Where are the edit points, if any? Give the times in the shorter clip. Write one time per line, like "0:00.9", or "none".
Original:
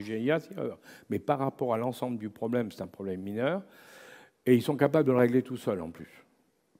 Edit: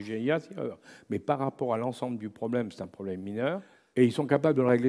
0:03.8

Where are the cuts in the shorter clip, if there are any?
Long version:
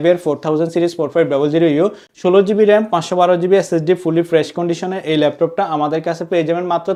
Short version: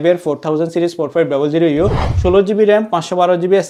none

